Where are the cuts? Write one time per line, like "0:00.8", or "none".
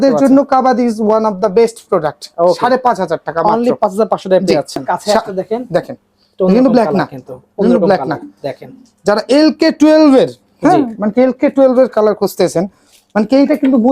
0:04.9